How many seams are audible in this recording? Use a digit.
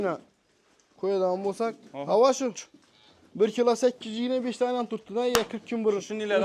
0